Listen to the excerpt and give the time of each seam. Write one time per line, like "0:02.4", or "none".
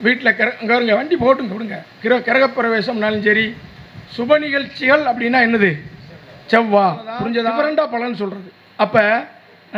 0:07.5